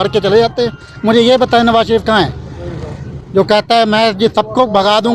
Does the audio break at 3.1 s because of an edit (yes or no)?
no